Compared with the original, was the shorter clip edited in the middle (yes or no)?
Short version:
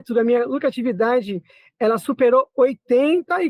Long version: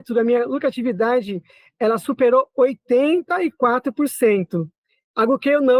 no